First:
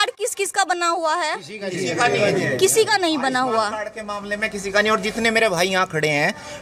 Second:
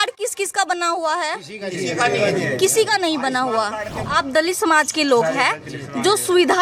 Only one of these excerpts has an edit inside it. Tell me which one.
second; 1 cut; at 4.0 s

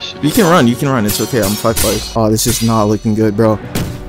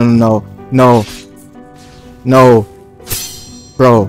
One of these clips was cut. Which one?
first; 1 cut; at 2.1 s

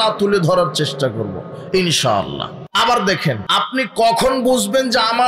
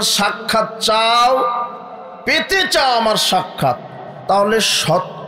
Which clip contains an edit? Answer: first; 2 cuts; at 2.6 s, 3.5 s

